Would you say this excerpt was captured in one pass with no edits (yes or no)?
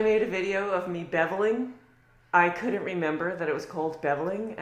yes